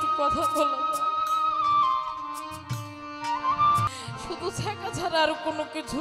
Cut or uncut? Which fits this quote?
cut